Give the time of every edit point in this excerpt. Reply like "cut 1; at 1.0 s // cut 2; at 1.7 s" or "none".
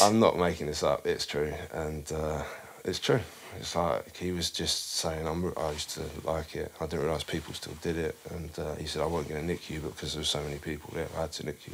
none